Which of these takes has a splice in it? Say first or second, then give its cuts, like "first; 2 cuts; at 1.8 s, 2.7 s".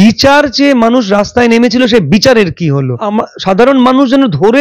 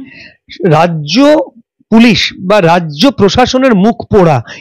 first; 1 cut; at 3.0 s